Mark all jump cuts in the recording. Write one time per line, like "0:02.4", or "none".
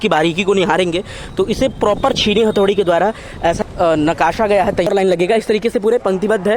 0:03.6
0:04.9